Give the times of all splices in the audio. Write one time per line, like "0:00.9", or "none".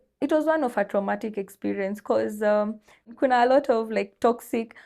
0:03.0